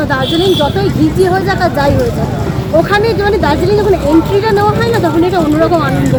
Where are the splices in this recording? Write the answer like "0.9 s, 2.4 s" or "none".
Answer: none